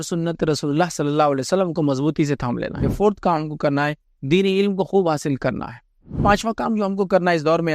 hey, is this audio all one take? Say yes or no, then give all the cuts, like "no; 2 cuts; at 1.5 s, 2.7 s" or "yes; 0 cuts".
no; 2 cuts; at 2.9 s, 6.2 s